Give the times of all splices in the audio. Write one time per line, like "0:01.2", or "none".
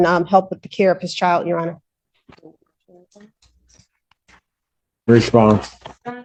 none